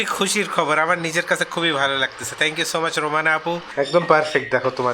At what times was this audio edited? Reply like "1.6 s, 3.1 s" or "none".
3.7 s